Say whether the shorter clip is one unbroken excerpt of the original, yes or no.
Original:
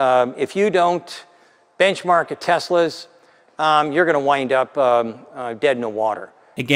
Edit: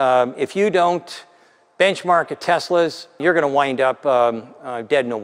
no